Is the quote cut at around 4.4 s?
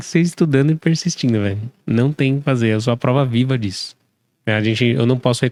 no; 0 cuts

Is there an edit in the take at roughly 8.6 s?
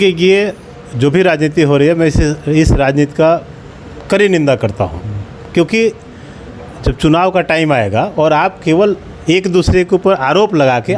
no; 0 cuts

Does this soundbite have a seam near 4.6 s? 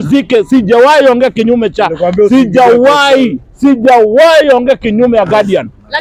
no; 0 cuts

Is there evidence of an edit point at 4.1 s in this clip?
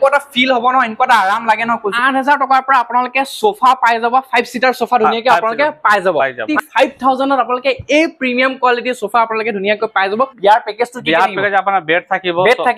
no; 3 cuts; at 1.9 s, 6.4 s, 10.3 s

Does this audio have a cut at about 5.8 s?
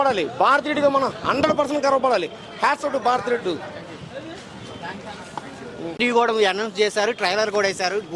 yes; 1 cut; at 5.8 s

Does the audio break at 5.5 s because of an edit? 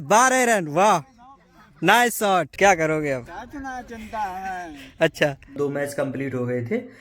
yes; 2 cuts; at 2.5 s, 5.5 s

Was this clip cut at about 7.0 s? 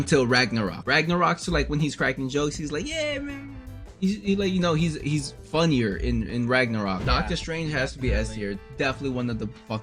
yes; 1 cut; at 7.0 s

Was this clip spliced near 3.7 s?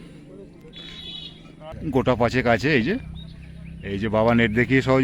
no; 1 cut; at 1.7 s

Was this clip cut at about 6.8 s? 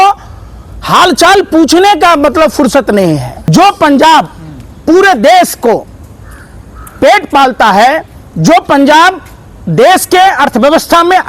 no; 1 cut; at 3.4 s

